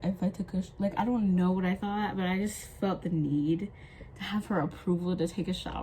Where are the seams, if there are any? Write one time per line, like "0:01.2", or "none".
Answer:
none